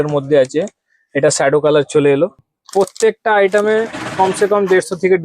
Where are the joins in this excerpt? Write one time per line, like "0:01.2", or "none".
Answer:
0:02.5